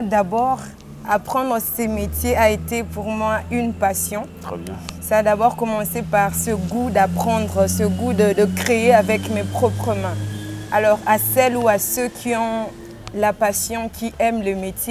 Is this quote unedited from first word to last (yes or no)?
yes